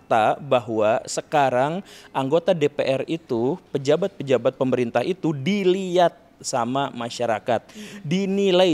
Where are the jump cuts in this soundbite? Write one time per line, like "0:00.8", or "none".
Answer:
none

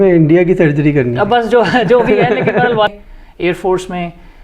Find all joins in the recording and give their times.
0:02.9

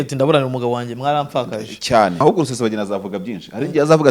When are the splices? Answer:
0:02.2

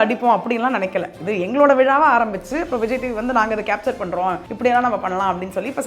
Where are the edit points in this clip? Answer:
0:04.5

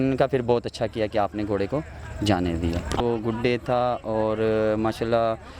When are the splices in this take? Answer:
0:03.0

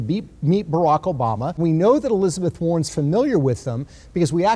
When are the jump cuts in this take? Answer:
0:01.6

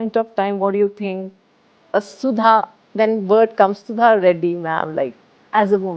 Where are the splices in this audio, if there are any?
none

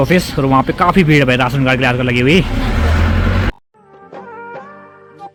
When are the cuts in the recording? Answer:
none

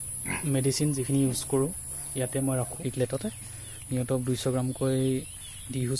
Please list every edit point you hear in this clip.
0:02.8

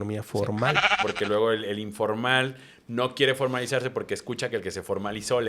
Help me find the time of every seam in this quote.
0:01.0

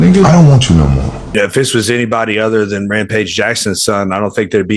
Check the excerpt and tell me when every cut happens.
0:01.2

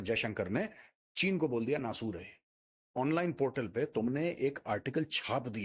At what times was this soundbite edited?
0:03.0

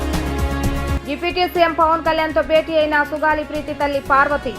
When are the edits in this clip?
0:01.0

